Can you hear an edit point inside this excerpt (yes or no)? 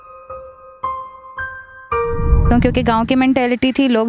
yes